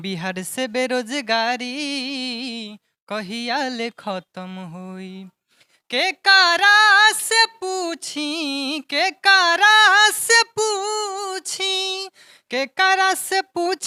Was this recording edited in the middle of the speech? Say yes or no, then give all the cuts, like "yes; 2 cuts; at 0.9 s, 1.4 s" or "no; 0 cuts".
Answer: no; 0 cuts